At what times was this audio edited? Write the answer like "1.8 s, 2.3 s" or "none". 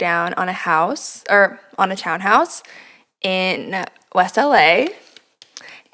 none

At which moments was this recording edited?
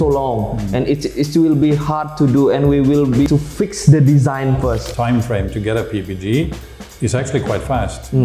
3.3 s, 4.9 s

